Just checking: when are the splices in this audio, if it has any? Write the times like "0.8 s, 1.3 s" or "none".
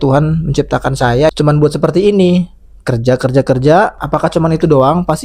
1.3 s, 4.0 s